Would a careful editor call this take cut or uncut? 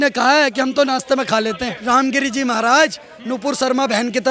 cut